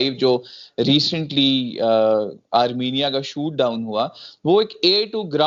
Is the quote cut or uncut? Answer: uncut